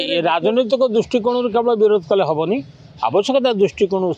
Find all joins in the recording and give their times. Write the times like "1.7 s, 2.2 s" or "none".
none